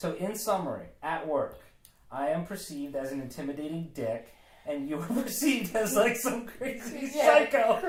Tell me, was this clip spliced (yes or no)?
no